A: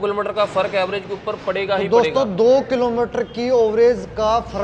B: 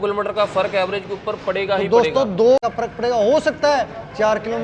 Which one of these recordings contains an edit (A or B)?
B